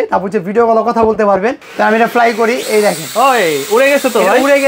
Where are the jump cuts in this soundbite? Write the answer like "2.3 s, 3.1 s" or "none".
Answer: 1.6 s

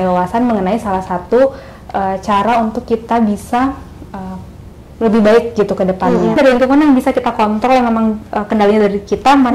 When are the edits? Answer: 6.4 s

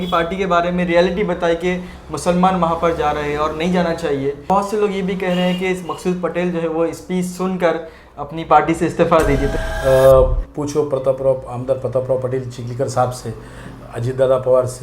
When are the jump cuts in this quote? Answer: 4.4 s, 9.6 s

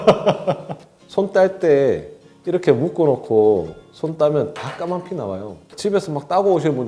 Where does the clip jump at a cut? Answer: 0.9 s, 5.7 s

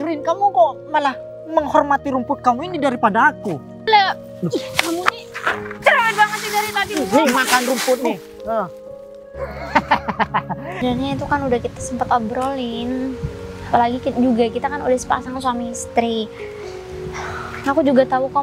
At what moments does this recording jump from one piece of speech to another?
3.9 s, 10.8 s

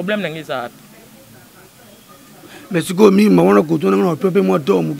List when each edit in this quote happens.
none

